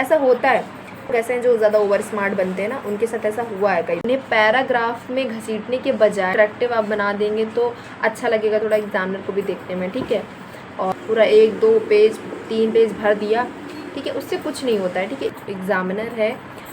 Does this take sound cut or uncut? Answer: cut